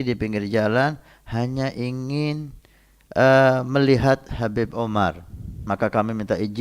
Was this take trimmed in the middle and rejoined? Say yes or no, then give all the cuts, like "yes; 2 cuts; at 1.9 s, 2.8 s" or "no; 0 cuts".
yes; 1 cut; at 5.6 s